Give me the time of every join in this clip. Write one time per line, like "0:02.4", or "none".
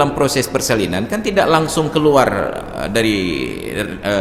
none

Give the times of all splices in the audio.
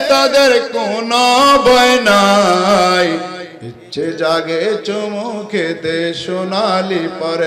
none

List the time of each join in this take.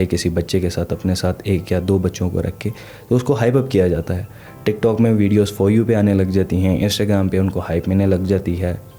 none

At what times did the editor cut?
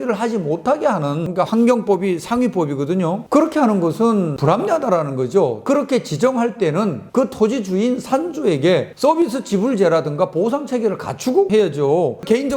0:01.3
0:05.7

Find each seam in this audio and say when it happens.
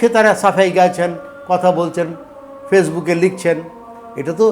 none

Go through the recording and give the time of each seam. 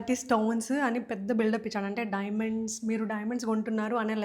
none

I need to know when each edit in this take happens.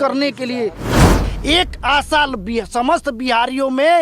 0:01.3

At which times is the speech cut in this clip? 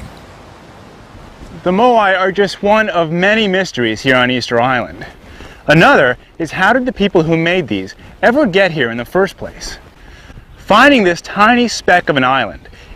none

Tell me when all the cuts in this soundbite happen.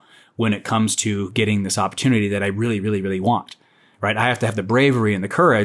none

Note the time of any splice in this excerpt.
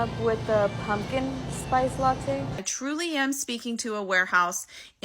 0:02.6

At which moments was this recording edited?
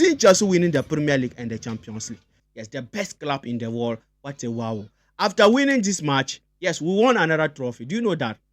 0:02.4

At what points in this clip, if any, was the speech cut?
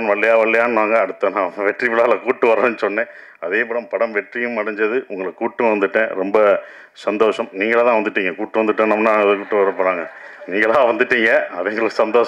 none

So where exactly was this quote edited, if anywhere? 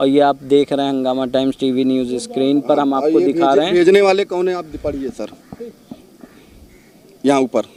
none

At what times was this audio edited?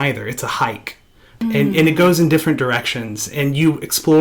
0:01.4

